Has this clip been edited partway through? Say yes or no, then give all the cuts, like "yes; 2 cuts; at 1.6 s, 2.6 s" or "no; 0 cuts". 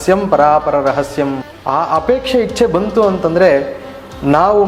yes; 1 cut; at 1.5 s